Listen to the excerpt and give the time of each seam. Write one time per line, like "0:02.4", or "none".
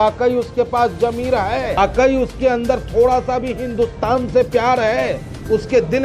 0:01.8